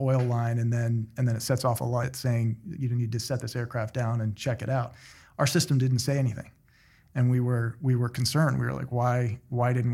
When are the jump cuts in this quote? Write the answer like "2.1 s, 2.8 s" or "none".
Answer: 2.1 s